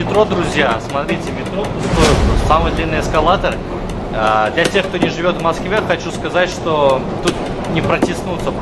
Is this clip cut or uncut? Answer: uncut